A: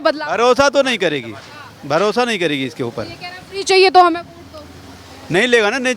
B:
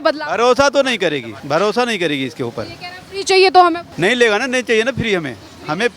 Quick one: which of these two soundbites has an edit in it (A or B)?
B